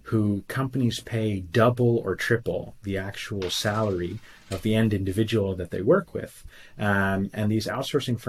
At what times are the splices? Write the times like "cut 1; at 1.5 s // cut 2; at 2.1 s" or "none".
none